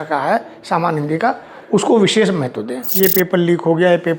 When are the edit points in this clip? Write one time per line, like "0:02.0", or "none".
0:02.9